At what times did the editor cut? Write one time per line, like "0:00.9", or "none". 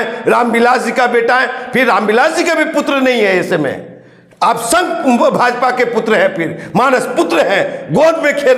none